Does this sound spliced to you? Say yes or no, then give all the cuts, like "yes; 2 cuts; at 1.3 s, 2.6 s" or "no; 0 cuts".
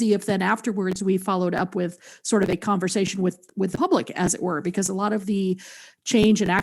no; 0 cuts